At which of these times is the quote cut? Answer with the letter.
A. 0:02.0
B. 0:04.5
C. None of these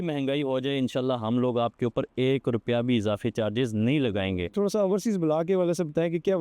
B